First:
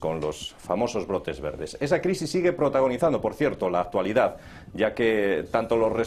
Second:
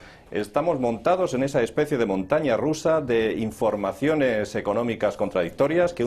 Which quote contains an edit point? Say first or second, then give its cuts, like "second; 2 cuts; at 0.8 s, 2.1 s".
first; 1 cut; at 1.6 s